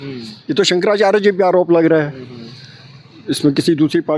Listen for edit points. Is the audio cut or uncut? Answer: uncut